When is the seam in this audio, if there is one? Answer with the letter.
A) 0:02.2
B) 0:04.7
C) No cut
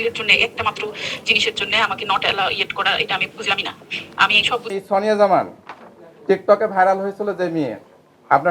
B